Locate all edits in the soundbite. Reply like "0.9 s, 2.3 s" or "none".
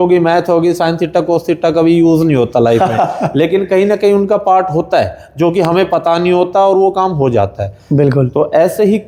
none